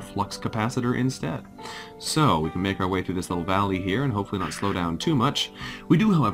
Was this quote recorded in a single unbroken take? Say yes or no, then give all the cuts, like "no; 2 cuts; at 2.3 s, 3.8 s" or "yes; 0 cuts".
yes; 0 cuts